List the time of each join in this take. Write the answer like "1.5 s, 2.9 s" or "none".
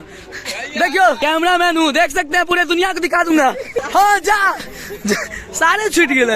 1.2 s, 3.7 s